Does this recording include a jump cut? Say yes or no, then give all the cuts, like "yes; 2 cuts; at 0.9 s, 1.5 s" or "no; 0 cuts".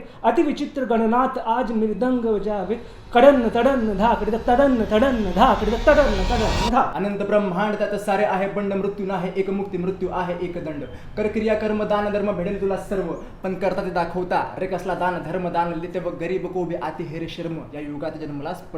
yes; 1 cut; at 6.9 s